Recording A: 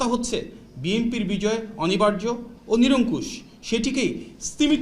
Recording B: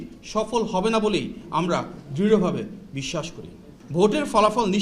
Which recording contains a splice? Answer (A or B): B